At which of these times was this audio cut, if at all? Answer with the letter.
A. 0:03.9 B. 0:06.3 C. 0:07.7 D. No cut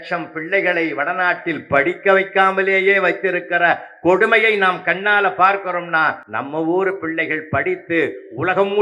B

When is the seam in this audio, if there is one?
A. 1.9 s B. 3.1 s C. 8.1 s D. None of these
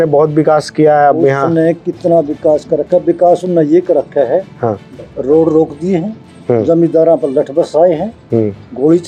D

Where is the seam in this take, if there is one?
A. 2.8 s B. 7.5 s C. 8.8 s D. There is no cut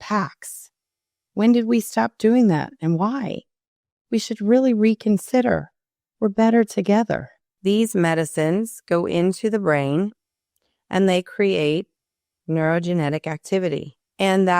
B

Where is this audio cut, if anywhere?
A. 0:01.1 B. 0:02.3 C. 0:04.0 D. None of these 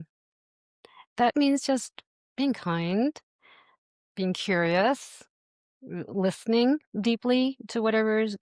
A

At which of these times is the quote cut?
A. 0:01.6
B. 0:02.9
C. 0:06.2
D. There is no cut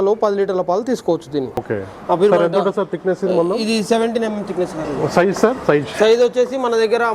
A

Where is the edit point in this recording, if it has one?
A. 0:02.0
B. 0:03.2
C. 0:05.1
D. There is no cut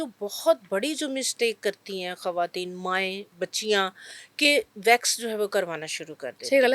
B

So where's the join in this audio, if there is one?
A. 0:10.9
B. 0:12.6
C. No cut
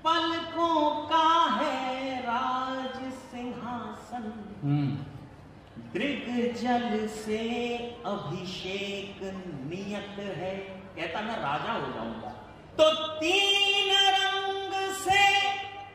B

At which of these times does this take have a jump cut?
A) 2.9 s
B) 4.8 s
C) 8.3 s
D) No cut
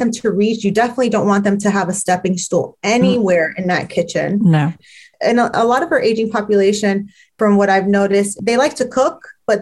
B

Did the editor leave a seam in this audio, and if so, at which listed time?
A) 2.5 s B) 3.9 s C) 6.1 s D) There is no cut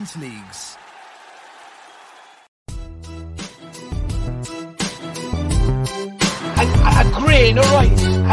A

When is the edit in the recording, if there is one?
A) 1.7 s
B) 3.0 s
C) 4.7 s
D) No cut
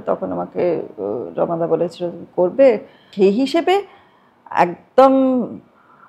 B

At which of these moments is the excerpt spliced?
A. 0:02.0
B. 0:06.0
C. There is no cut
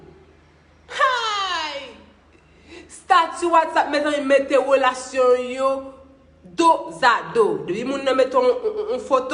C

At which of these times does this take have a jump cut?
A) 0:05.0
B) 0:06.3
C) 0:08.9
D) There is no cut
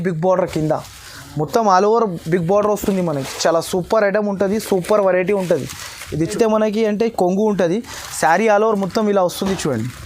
B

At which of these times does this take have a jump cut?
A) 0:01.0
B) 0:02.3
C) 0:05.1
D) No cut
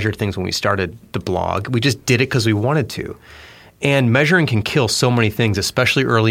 A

